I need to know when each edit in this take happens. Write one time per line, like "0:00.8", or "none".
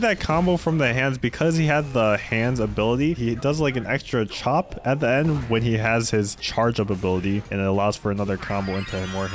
0:03.2
0:06.4
0:07.5